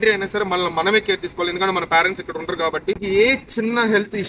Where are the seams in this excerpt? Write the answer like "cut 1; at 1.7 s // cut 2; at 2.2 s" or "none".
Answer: cut 1; at 3.0 s